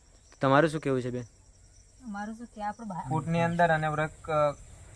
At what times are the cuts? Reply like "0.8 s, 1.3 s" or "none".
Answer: 2.9 s